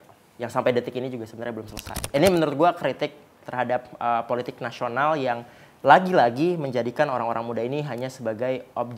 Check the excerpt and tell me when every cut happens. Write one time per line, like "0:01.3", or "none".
0:02.0